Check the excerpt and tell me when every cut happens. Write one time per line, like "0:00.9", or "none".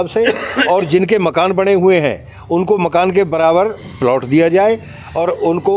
none